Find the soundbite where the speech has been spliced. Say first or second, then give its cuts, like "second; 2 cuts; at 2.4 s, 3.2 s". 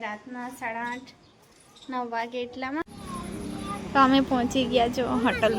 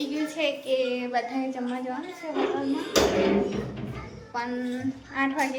first; 1 cut; at 3.0 s